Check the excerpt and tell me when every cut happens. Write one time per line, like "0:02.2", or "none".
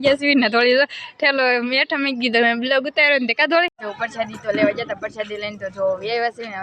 0:03.8